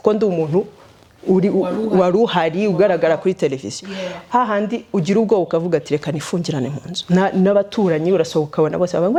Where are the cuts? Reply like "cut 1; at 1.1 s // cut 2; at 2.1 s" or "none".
none